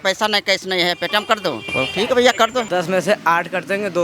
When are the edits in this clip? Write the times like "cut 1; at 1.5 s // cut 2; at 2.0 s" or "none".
cut 1; at 1.7 s // cut 2; at 2.7 s